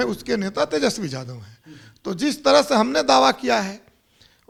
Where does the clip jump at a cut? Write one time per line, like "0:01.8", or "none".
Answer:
none